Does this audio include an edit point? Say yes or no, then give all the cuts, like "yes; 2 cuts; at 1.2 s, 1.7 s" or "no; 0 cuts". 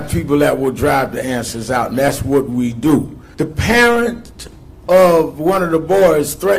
yes; 1 cut; at 3.2 s